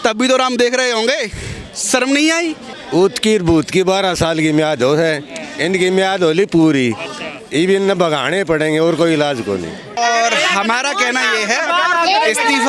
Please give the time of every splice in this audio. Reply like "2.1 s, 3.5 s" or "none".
2.7 s, 10.0 s